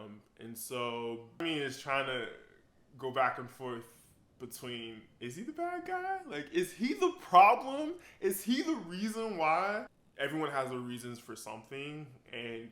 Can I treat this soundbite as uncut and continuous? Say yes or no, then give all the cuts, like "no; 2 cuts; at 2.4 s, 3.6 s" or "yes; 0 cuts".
no; 2 cuts; at 1.4 s, 10.0 s